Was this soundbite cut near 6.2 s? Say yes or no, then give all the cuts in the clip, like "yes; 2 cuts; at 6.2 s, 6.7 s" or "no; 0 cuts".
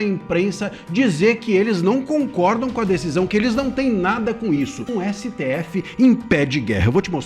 no; 1 cut; at 4.9 s